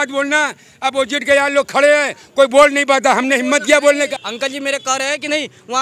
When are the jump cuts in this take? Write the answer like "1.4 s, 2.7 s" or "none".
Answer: 4.0 s